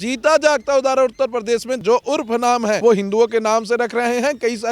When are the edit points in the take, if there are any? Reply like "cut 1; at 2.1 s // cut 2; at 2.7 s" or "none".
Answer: cut 1; at 1.7 s // cut 2; at 2.8 s